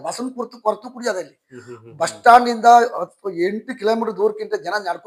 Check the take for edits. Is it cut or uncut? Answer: uncut